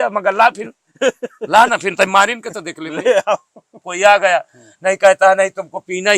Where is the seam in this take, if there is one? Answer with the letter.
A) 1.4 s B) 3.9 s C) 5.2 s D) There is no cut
B